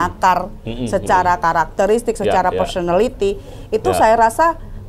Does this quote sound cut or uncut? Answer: uncut